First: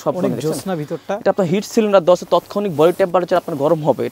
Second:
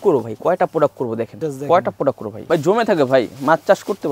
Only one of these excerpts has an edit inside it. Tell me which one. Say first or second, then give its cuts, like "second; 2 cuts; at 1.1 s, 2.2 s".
second; 2 cuts; at 1.4 s, 2.3 s